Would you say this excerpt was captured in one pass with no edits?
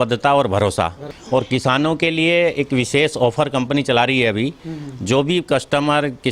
no; 1 cut; at 1.0 s

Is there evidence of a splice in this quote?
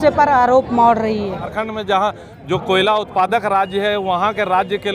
yes; 1 cut; at 1.5 s

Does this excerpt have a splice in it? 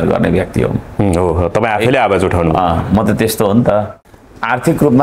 yes; 1 cut; at 3.9 s

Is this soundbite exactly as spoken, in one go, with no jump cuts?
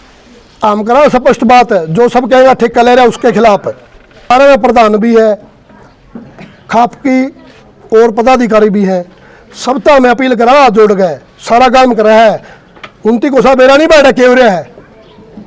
no; 1 cut; at 4.3 s

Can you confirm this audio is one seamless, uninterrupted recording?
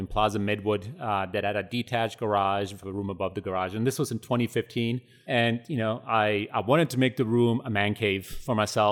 no; 1 cut; at 5.1 s

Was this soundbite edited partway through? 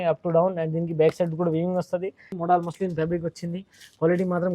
yes; 1 cut; at 2.3 s

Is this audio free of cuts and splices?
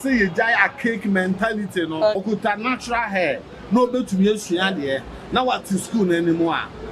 no; 1 cut; at 2.2 s

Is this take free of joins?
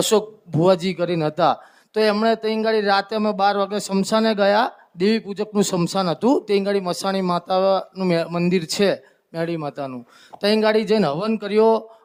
yes; 0 cuts

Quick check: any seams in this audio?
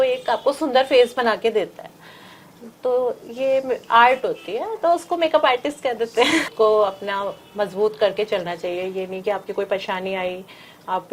yes; 1 cut; at 6.5 s

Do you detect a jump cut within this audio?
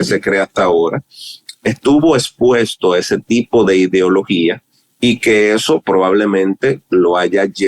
no; 0 cuts

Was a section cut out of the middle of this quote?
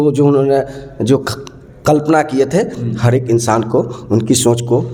no; 0 cuts

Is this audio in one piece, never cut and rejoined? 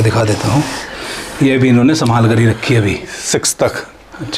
yes; 0 cuts

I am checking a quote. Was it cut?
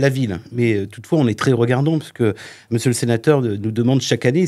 no; 0 cuts

